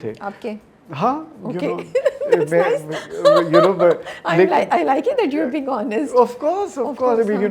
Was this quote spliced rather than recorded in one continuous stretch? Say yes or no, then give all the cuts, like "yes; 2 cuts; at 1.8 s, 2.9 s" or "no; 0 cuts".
no; 0 cuts